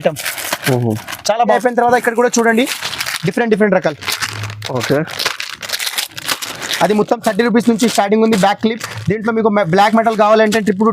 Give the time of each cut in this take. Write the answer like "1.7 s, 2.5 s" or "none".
1.6 s